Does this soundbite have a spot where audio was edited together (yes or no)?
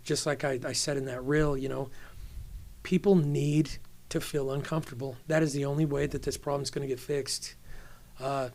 no